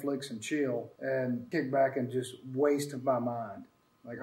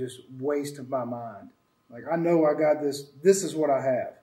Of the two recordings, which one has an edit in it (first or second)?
first